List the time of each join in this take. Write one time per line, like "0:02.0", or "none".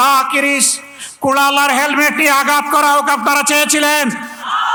none